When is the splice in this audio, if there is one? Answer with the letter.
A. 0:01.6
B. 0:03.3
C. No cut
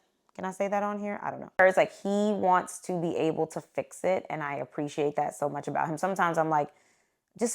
A